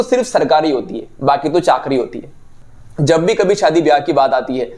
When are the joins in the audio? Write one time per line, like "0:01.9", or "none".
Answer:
0:02.4